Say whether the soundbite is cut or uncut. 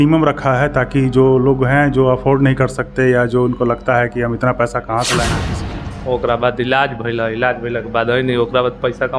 cut